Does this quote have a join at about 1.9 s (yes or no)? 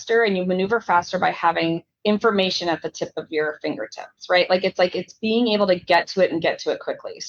yes